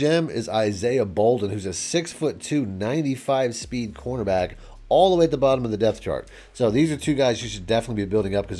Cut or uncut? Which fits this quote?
uncut